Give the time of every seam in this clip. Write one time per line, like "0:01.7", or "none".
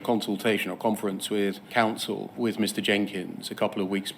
none